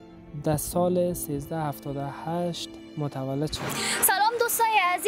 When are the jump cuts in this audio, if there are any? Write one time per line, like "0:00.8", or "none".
0:04.0